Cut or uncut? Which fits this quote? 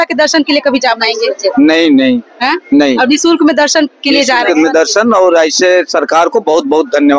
uncut